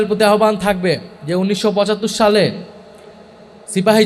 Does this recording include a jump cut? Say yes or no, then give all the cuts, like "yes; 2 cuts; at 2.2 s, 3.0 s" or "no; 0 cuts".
no; 0 cuts